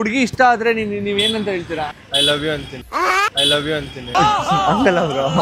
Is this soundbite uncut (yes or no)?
yes